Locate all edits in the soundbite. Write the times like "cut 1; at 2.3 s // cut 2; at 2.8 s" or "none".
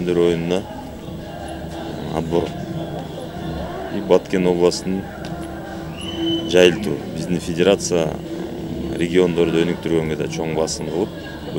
none